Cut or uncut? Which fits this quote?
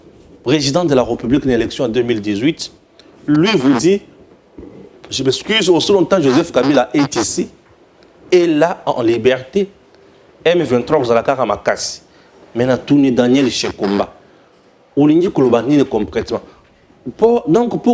uncut